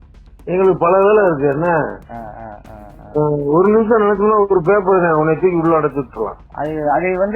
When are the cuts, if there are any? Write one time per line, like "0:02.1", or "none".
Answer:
0:06.4